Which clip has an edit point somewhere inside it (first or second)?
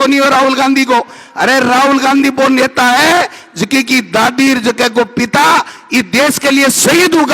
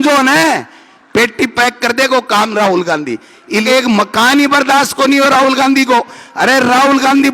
second